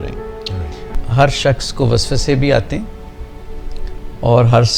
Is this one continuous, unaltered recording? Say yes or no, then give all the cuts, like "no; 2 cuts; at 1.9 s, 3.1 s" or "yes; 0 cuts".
no; 1 cut; at 0.9 s